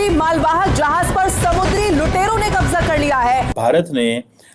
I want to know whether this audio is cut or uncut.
cut